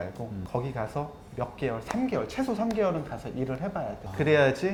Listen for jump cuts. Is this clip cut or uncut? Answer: uncut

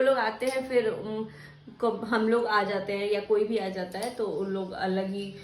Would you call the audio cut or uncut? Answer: uncut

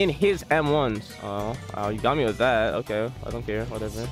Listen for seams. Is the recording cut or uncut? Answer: cut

